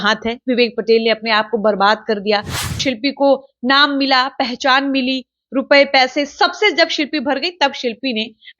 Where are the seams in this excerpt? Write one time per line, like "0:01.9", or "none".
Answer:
0:02.8